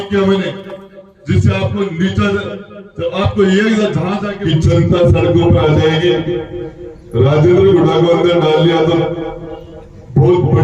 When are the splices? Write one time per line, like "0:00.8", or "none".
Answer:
0:04.3